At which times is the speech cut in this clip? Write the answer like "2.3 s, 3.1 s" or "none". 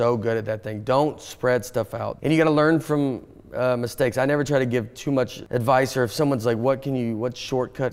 2.1 s, 5.4 s